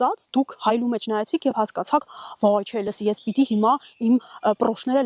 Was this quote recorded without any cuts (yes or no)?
yes